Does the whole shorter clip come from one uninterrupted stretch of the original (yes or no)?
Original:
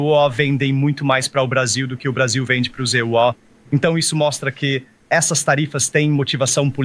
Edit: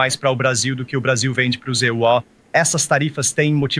no